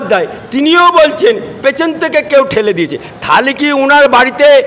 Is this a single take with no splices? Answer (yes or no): yes